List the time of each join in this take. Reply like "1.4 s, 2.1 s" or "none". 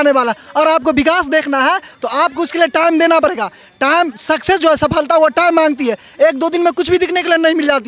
none

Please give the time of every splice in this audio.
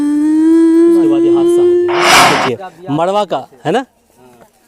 2.3 s

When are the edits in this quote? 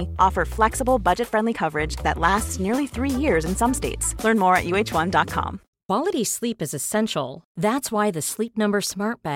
5.6 s

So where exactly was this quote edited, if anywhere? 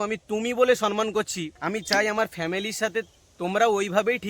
1.5 s

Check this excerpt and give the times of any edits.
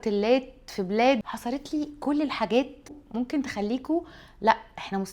1.3 s, 3.0 s

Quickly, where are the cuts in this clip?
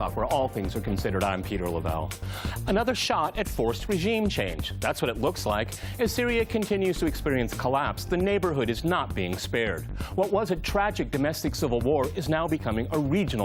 none

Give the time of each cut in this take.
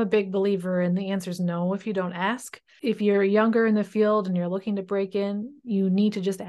2.7 s

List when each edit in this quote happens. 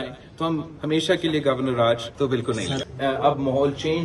2.5 s

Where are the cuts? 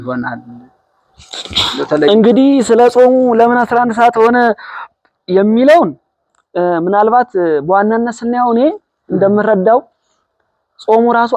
none

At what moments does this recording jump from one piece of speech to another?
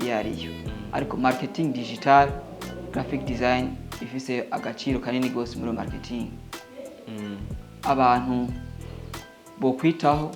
7.7 s

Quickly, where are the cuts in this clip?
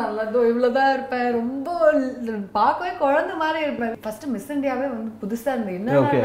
4.0 s

